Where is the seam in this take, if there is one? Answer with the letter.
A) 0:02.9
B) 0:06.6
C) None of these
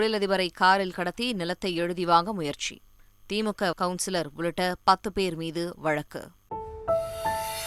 B